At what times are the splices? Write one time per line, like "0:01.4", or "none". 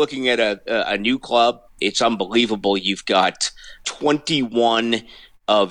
0:01.7
0:03.8